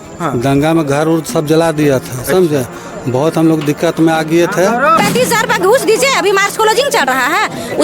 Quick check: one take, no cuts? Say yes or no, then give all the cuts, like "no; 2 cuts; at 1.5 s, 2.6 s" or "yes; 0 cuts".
no; 1 cut; at 4.9 s